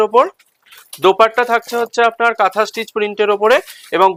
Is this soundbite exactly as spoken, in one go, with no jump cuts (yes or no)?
yes